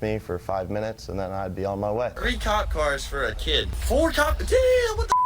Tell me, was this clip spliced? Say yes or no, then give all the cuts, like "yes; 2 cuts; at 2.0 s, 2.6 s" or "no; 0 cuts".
yes; 2 cuts; at 2.2 s, 3.8 s